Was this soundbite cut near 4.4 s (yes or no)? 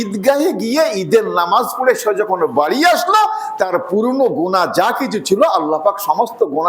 no